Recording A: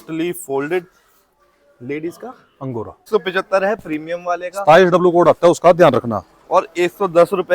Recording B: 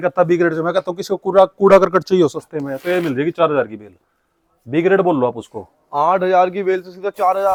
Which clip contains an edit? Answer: A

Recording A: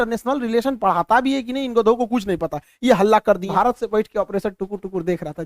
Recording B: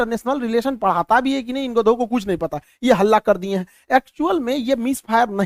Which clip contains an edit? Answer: A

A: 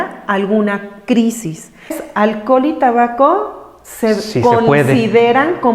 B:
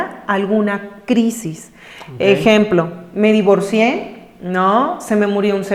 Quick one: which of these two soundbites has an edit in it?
A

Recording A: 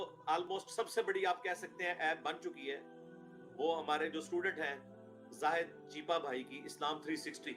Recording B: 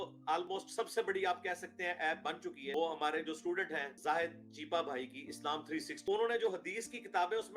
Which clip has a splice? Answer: B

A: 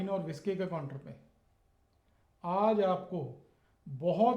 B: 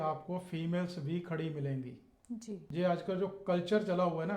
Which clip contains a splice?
B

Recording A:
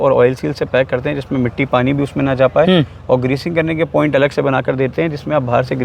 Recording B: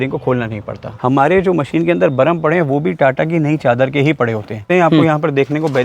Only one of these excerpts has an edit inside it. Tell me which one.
B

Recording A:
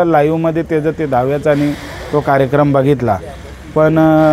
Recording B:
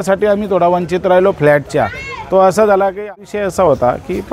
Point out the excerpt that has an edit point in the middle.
B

